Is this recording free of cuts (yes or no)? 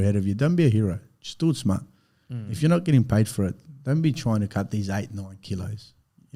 yes